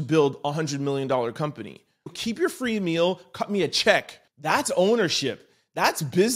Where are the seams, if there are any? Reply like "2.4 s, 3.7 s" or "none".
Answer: 2.1 s, 4.2 s